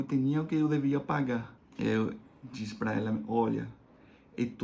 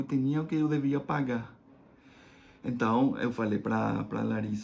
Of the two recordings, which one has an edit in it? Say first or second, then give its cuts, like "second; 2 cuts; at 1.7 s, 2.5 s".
first; 1 cut; at 1.6 s